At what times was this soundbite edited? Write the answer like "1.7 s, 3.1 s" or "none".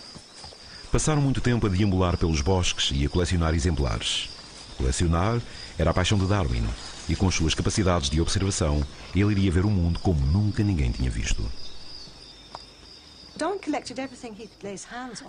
none